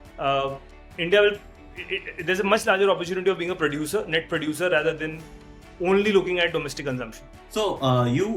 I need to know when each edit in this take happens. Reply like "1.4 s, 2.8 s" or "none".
none